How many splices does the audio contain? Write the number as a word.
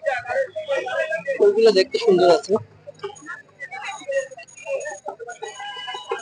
zero